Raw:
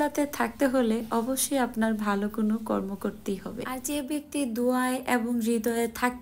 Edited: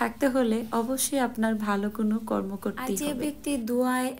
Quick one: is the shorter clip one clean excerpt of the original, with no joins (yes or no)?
no